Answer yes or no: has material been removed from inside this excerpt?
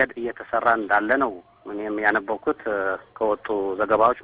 no